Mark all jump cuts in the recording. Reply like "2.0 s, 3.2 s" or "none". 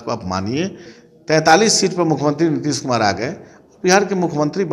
0.9 s